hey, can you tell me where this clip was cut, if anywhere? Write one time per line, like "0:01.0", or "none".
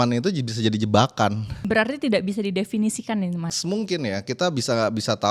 0:01.5
0:03.5